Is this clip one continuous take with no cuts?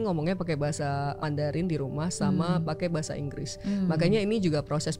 no; 1 cut; at 1.2 s

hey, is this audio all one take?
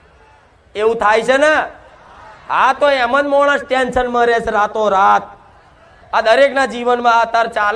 no; 1 cut; at 6.0 s

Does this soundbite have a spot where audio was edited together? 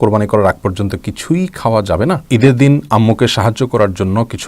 yes; 1 cut; at 2.2 s

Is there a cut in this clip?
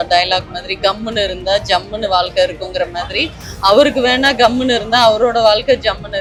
no; 0 cuts

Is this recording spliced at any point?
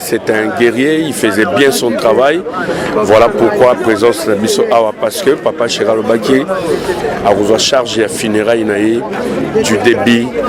no; 0 cuts

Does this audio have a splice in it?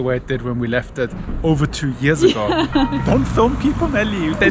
yes; 1 cut; at 3.0 s

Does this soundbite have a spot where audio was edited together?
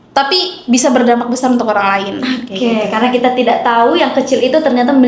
no; 0 cuts

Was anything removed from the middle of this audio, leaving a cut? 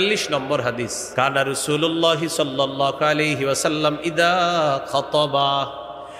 yes; 1 cut; at 1.0 s

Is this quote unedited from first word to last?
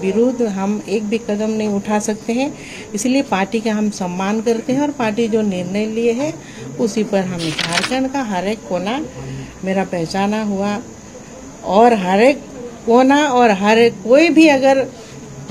no; 1 cut; at 7.6 s

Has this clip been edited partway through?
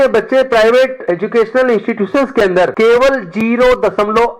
yes; 2 cuts; at 1.0 s, 2.7 s

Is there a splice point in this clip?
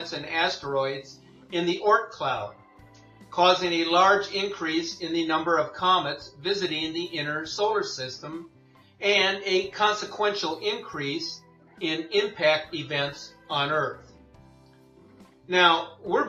no; 0 cuts

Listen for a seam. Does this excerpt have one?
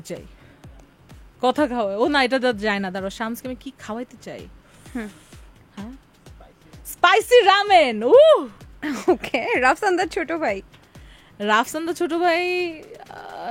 no; 0 cuts

